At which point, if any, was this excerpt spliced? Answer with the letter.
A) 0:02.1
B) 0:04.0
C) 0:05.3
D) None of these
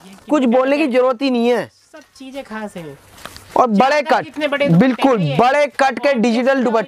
D